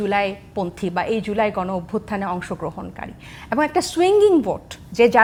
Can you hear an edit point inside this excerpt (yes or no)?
no